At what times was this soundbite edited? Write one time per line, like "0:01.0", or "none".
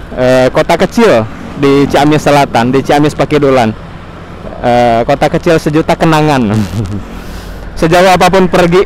none